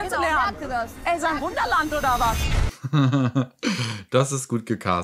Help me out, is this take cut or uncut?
uncut